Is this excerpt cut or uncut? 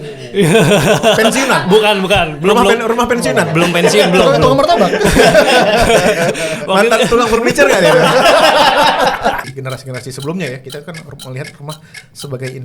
cut